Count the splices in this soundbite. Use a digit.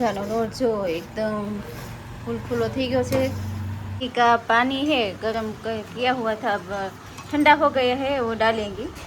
1